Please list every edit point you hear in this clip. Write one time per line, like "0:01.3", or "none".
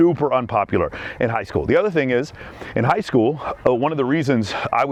none